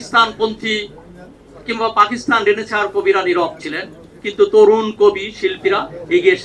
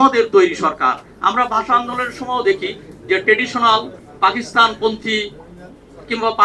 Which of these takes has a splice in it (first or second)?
second